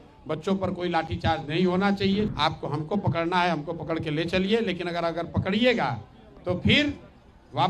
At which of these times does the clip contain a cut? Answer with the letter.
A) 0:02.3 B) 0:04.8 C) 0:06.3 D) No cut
A